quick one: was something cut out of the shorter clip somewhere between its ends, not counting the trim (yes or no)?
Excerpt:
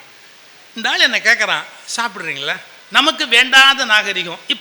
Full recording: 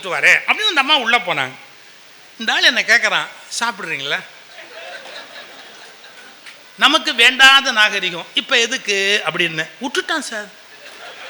yes